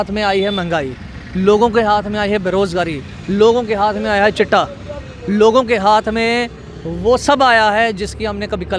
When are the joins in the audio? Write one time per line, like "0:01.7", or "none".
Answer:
none